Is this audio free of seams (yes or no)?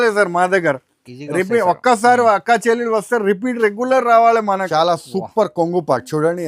no